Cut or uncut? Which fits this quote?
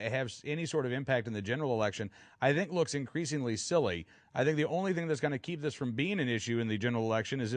cut